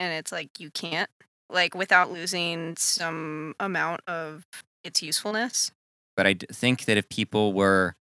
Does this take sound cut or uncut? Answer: cut